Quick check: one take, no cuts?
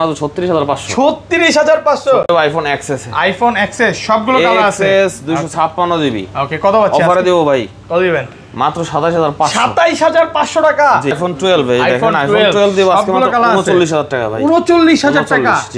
no; 2 cuts; at 2.3 s, 11.2 s

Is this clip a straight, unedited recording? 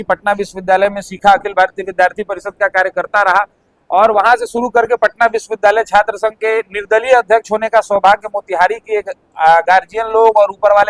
yes; 0 cuts

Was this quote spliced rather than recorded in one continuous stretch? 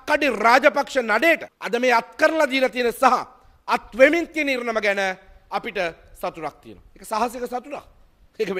yes; 1 cut; at 1.5 s

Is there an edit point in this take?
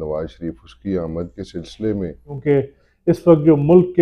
yes; 1 cut; at 2.3 s

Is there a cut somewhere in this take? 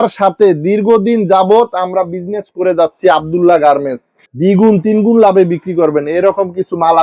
yes; 1 cut; at 4.2 s

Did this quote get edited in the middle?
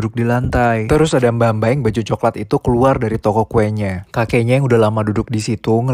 yes; 1 cut; at 1.4 s

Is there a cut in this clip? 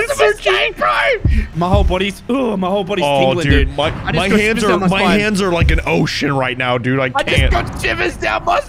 no; 0 cuts

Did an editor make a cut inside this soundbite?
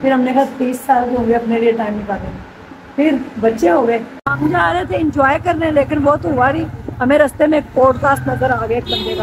yes; 1 cut; at 4.2 s

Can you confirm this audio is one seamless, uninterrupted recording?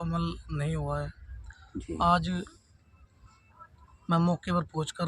yes; 0 cuts

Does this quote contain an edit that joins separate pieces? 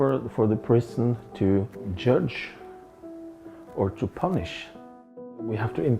yes; 2 cuts; at 1.9 s, 5.1 s

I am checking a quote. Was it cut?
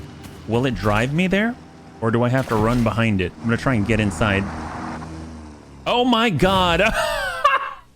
yes; 1 cut; at 3.4 s

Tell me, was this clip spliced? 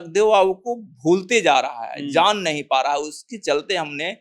no; 0 cuts

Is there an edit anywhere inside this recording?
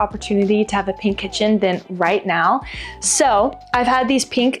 no; 0 cuts

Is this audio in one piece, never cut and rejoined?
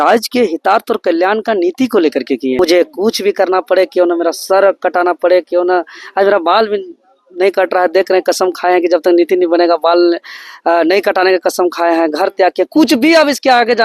no; 1 cut; at 2.6 s

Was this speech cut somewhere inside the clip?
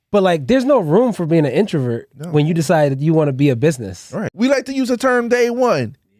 yes; 1 cut; at 4.2 s

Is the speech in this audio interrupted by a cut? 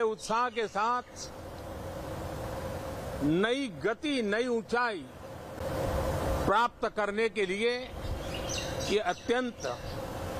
no; 0 cuts

